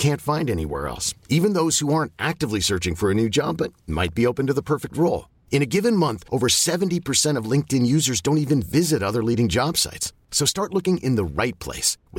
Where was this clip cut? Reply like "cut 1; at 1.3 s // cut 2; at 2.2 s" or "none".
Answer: none